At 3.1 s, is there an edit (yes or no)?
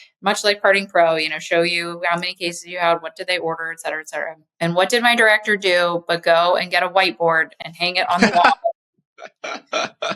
no